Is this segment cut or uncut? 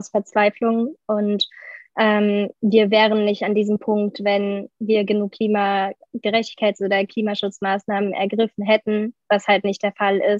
uncut